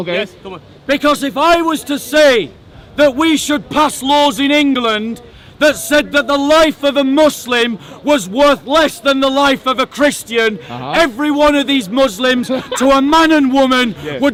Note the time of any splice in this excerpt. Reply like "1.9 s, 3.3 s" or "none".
none